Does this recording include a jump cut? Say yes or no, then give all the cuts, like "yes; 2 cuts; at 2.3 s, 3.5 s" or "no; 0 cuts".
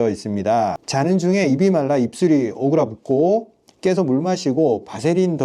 no; 0 cuts